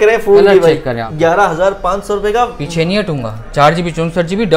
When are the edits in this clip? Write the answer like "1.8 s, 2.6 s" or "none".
1.0 s